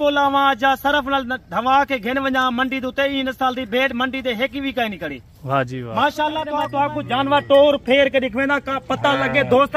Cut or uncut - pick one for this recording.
cut